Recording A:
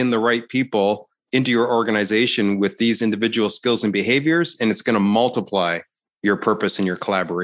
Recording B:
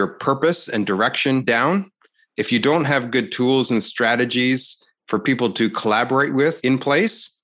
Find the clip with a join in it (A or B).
B